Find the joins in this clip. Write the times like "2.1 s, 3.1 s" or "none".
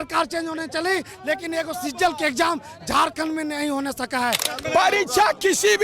4.5 s